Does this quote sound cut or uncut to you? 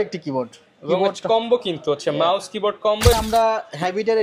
cut